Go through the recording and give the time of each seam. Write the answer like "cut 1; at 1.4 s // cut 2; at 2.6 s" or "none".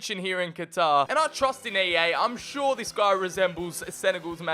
cut 1; at 1.1 s